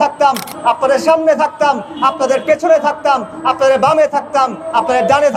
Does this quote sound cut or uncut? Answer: uncut